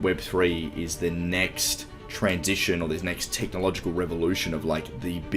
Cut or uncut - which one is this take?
uncut